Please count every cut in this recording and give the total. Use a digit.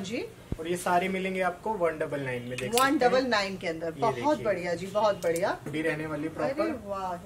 1